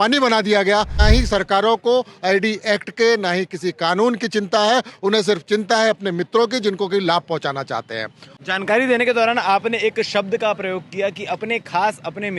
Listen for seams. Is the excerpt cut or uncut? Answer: cut